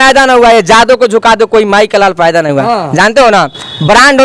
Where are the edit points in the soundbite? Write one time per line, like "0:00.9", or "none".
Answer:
none